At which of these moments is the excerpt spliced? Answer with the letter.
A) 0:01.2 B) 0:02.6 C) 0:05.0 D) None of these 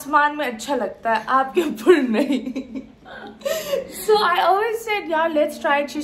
D